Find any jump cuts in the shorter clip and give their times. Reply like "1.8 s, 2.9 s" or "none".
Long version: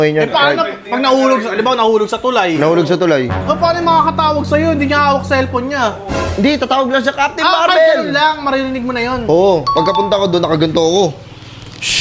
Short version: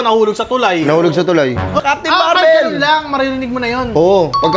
1.8 s